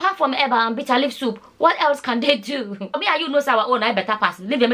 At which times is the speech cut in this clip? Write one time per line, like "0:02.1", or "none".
0:02.9